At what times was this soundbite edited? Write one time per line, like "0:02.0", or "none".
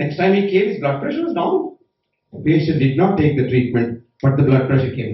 0:02.3